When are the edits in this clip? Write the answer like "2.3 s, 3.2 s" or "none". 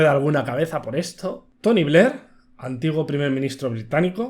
none